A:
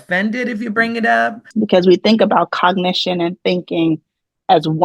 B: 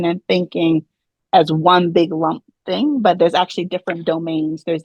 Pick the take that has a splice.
A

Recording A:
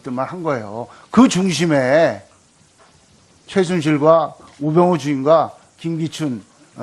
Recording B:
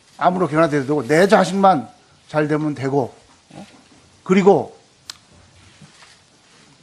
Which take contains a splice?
B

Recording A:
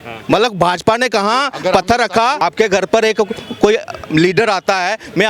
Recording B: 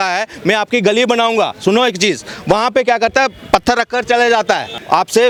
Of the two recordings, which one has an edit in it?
A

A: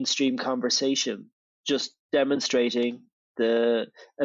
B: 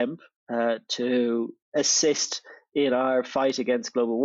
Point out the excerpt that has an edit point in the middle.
B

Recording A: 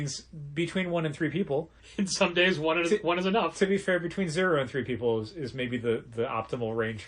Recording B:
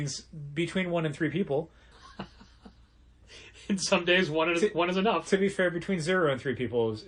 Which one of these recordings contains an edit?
A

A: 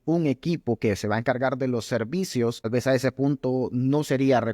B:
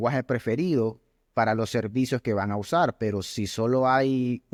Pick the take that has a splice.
A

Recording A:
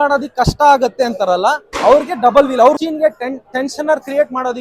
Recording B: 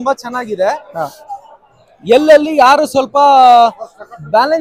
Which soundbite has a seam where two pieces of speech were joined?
A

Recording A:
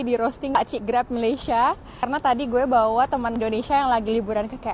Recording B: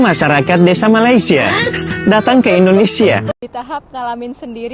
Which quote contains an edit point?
B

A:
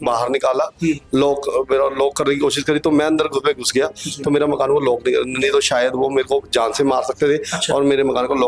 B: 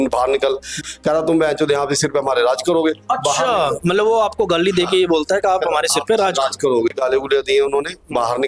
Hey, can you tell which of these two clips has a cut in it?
B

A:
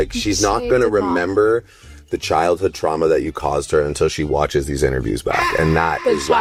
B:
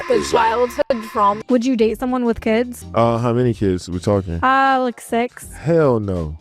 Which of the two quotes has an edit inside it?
B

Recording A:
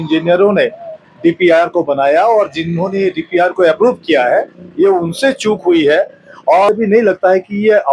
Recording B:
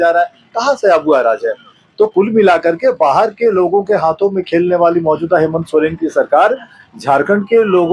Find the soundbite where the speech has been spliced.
A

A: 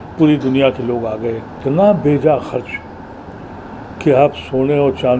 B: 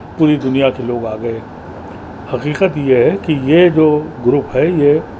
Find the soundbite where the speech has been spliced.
A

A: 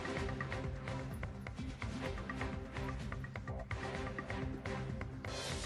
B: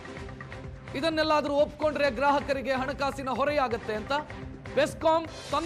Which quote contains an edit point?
B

